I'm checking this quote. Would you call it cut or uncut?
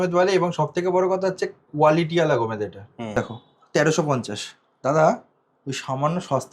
cut